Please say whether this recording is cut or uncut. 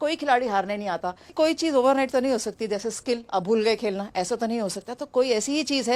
cut